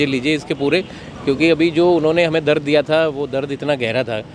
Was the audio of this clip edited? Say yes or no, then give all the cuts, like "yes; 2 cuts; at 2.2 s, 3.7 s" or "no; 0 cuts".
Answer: no; 0 cuts